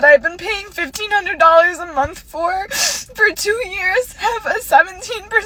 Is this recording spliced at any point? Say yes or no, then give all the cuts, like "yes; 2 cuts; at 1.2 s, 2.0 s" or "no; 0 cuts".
no; 0 cuts